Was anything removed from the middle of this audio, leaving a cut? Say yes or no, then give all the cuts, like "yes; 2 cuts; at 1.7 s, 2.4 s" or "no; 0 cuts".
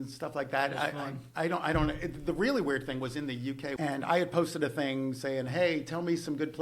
yes; 1 cut; at 3.7 s